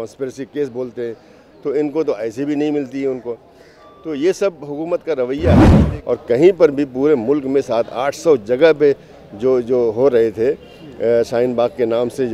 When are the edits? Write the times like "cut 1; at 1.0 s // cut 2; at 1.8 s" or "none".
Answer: cut 1; at 5.9 s